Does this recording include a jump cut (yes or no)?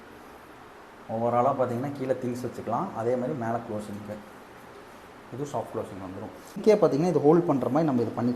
yes